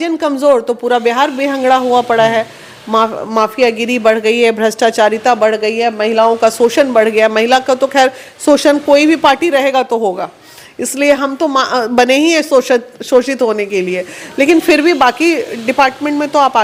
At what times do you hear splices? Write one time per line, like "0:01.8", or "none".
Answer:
none

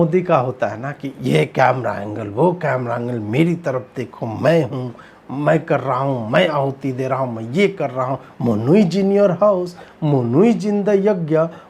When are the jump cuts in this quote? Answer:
none

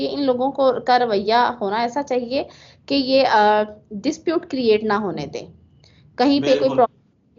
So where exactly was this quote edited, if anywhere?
none

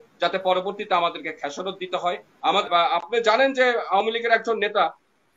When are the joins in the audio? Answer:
0:02.7

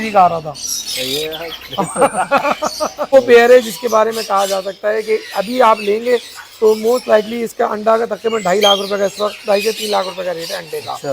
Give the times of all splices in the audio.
0:03.1

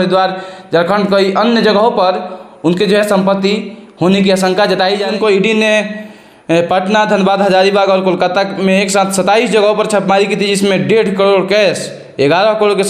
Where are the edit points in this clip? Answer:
0:05.1

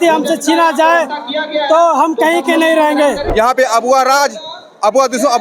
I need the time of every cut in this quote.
0:03.3

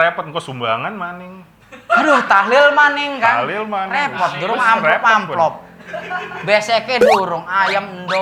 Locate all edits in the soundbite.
none

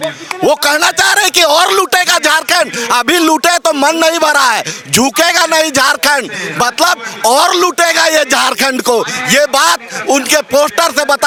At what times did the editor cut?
none

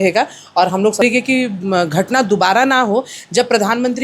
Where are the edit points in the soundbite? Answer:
0:01.0

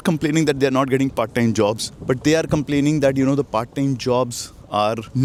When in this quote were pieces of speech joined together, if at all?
none

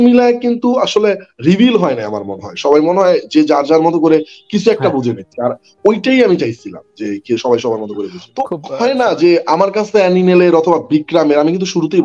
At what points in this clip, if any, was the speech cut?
0:08.2

